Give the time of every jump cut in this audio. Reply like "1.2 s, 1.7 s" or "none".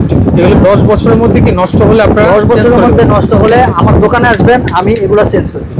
none